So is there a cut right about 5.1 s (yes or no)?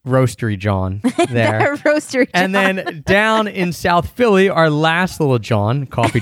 yes